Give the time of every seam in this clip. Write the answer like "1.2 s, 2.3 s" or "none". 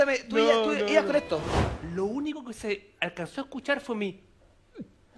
1.6 s